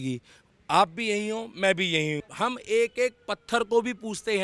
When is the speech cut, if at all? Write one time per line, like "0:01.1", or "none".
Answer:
0:02.3